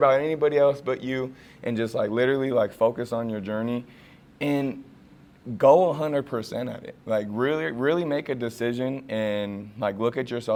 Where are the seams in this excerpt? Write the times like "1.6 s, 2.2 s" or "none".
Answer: none